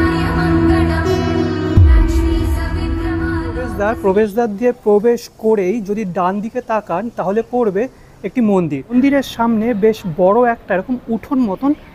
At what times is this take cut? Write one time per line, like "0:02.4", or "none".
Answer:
0:03.7
0:08.9